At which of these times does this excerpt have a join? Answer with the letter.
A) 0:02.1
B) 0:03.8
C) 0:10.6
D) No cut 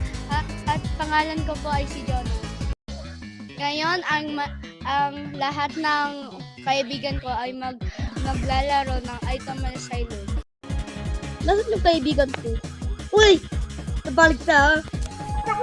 C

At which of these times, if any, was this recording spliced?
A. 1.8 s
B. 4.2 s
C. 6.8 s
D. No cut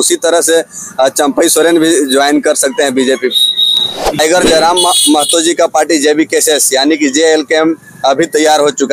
B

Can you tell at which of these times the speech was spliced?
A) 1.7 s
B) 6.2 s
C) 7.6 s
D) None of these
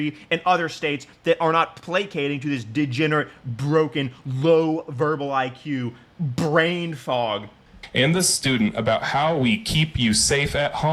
C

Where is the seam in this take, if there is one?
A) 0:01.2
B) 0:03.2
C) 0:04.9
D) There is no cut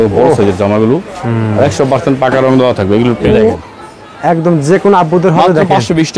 B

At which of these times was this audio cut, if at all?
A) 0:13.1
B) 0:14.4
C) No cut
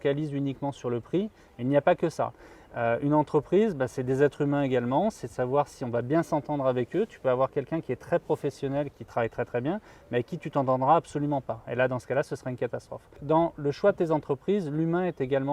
A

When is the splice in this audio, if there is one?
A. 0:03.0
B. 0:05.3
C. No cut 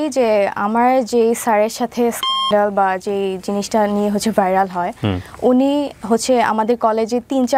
C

